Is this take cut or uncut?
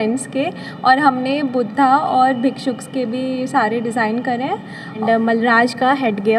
cut